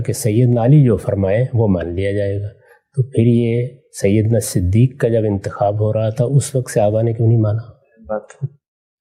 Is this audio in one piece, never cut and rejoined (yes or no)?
yes